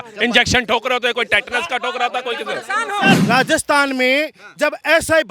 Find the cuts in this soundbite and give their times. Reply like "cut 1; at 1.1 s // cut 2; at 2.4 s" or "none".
cut 1; at 3.2 s